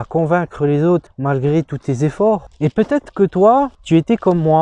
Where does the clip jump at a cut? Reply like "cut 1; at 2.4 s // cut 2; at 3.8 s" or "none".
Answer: cut 1; at 2.5 s